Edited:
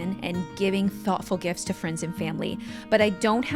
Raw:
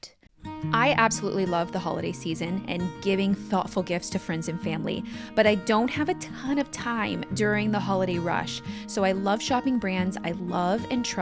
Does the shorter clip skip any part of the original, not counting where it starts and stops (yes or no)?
no